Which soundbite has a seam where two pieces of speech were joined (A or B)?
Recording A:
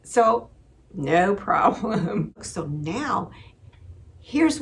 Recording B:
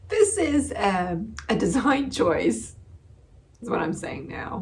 A